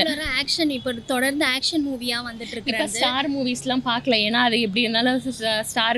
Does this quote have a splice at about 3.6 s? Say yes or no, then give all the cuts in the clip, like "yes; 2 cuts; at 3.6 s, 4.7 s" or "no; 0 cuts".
no; 0 cuts